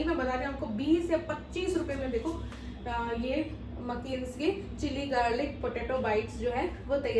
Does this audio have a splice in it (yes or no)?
no